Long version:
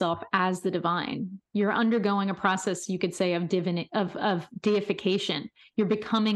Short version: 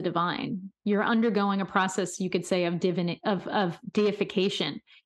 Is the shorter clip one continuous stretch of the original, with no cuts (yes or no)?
yes